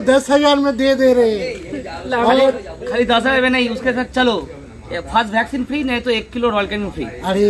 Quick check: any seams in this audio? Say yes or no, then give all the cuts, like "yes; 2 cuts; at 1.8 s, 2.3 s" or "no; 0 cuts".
no; 0 cuts